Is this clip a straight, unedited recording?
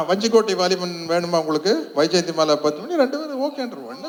yes; 0 cuts

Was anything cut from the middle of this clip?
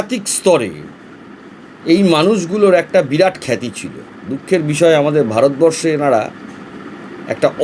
no; 0 cuts

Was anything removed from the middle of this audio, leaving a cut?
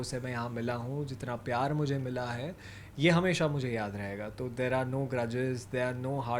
no; 0 cuts

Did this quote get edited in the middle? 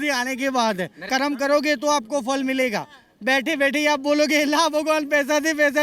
yes; 1 cut; at 1.0 s

